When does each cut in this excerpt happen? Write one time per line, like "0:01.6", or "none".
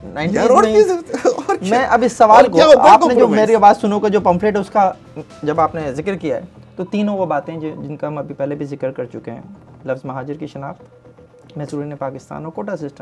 none